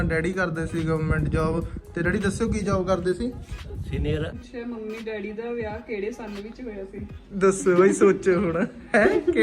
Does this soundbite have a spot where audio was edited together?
yes; 1 cut; at 4.3 s

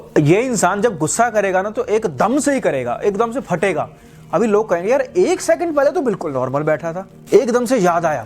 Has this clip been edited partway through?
yes; 1 cut; at 7.1 s

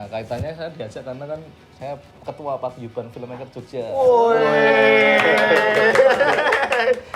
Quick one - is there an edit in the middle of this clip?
no; 0 cuts

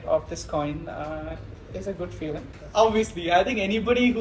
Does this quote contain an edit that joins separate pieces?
yes; 1 cut; at 2.5 s

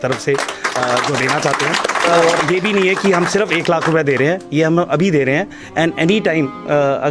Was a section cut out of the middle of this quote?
yes; 1 cut; at 2.4 s

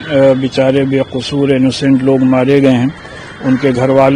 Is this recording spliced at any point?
no; 0 cuts

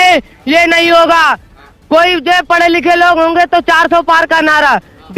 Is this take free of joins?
yes; 0 cuts

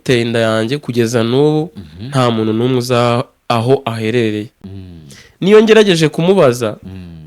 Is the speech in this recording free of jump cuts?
yes; 0 cuts

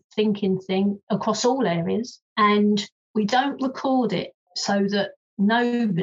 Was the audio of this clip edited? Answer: yes; 3 cuts; at 2.2 s, 3.0 s, 4.9 s

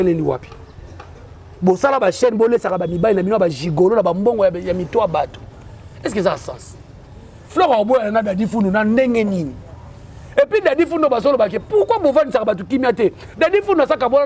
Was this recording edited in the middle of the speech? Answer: no; 0 cuts

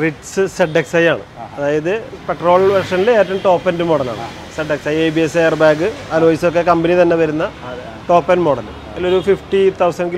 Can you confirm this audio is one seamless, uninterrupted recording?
yes; 0 cuts

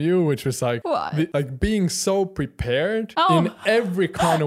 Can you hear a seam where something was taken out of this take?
yes; 2 cuts; at 1.0 s, 3.1 s

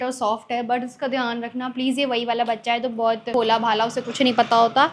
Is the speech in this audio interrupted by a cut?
yes; 1 cut; at 3.3 s

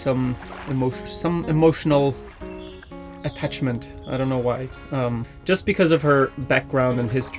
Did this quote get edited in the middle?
yes; 1 cut; at 5.3 s

